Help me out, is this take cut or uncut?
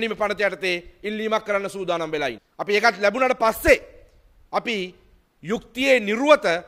cut